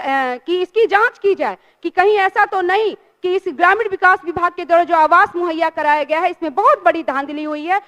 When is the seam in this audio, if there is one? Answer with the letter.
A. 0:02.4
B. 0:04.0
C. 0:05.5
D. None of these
D